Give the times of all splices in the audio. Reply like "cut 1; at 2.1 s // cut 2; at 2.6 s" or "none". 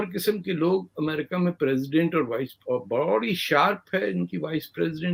none